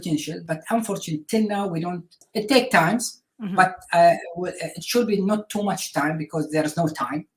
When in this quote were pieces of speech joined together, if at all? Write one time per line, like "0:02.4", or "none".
0:02.2